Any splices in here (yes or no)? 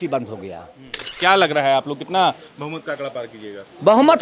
yes